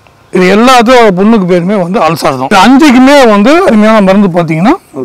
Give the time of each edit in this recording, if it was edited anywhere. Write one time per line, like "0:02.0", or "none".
none